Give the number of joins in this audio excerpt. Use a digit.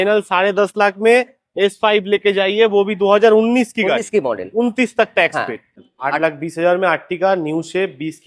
1